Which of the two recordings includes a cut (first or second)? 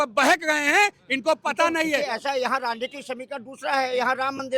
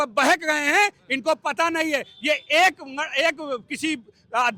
first